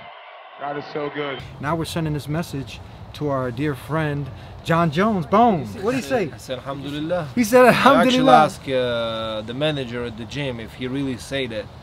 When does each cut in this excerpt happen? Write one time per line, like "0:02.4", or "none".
0:01.5
0:05.7
0:08.5